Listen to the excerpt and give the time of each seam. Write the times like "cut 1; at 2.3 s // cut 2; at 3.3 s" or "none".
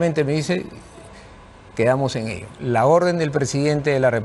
cut 1; at 2.5 s

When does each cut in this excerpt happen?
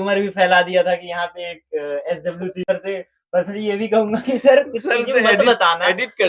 cut 1; at 2.7 s

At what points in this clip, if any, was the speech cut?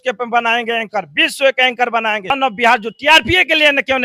cut 1; at 2.3 s

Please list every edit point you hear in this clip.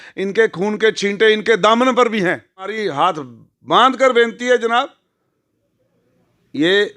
cut 1; at 2.8 s

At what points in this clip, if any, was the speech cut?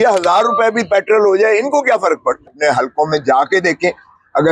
cut 1; at 2.5 s

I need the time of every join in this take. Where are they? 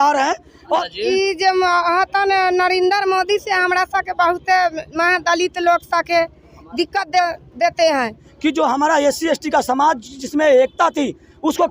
cut 1; at 0.9 s // cut 2; at 8.3 s

